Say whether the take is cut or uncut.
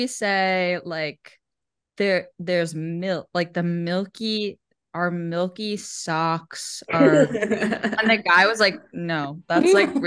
uncut